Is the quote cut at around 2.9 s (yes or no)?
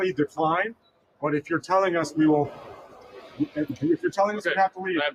no